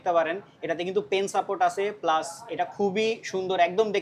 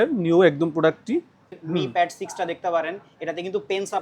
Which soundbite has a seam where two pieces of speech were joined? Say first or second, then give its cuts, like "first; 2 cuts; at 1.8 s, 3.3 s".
second; 1 cut; at 1.5 s